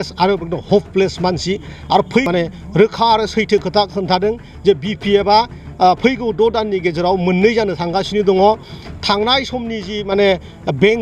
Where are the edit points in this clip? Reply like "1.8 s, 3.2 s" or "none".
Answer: 2.3 s